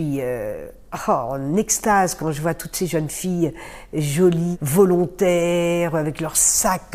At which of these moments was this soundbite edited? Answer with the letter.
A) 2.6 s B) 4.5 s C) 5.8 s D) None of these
B